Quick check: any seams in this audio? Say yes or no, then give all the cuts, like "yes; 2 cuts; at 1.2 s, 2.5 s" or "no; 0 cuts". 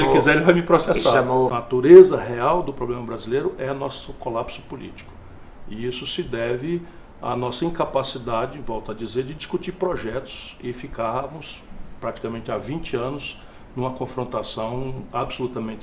yes; 1 cut; at 1.5 s